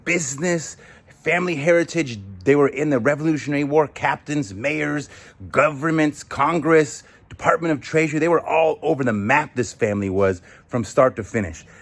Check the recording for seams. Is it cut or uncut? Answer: uncut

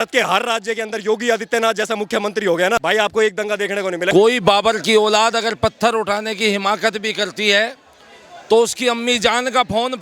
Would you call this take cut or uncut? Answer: cut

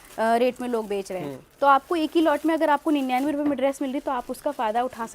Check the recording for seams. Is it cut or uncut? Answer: uncut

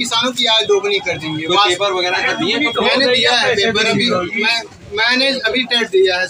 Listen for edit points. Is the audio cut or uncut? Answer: uncut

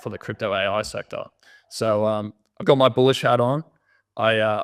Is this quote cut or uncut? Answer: uncut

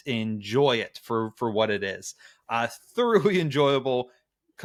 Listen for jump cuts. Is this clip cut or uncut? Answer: uncut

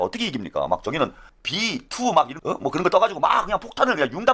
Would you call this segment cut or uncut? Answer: cut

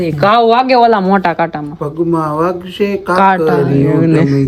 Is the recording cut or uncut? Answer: uncut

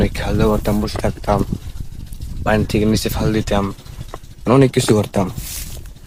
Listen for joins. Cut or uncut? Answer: uncut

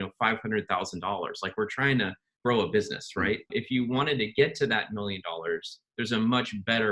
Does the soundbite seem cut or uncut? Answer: cut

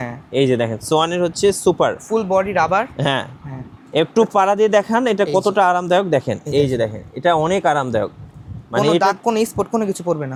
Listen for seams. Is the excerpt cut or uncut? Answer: uncut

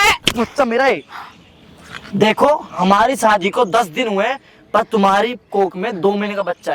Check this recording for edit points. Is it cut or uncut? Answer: uncut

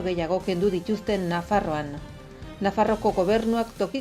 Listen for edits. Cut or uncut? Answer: uncut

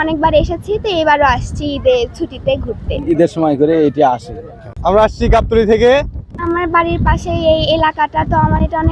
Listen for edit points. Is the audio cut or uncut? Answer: cut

